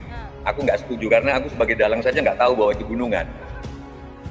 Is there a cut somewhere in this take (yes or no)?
no